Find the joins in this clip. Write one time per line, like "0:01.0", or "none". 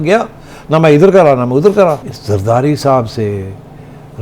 0:02.1